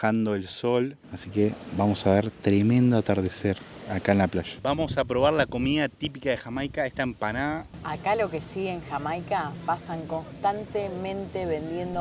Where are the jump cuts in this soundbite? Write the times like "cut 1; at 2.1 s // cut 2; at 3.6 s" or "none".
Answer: cut 1; at 1.0 s // cut 2; at 4.5 s // cut 3; at 7.7 s